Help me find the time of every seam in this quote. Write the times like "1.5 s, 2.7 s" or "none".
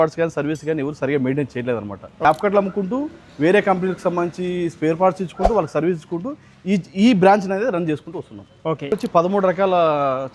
2.2 s, 8.9 s